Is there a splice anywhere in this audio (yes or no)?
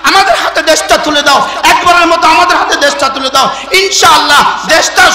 no